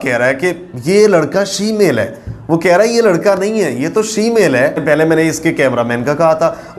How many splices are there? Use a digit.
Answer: 1